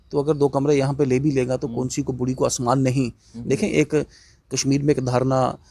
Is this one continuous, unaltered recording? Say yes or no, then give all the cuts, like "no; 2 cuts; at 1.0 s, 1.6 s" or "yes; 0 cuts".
yes; 0 cuts